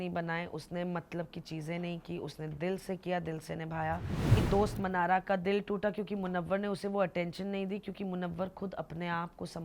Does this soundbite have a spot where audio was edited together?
yes; 1 cut; at 4.4 s

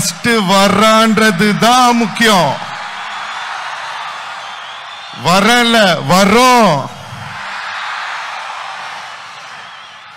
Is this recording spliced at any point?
no; 0 cuts

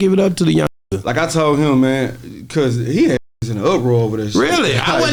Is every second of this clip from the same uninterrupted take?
yes; 0 cuts

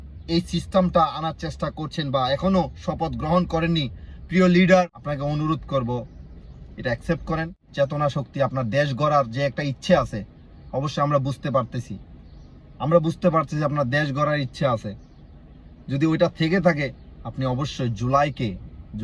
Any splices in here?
yes; 2 cuts; at 5.0 s, 7.6 s

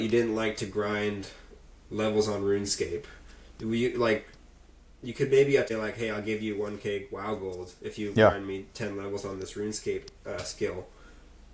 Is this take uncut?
no; 1 cut; at 5.7 s

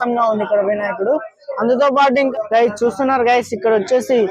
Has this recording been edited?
yes; 1 cut; at 2.3 s

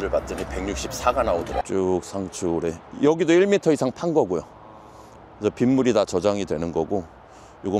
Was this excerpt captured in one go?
no; 1 cut; at 1.6 s

